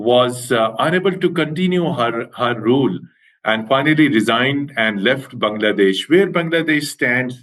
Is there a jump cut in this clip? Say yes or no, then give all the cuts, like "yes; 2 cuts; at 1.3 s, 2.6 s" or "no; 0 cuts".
no; 0 cuts